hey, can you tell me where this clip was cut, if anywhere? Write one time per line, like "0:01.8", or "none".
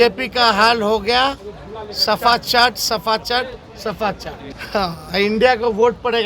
0:04.4